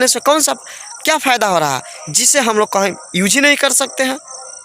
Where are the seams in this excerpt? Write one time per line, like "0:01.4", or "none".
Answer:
none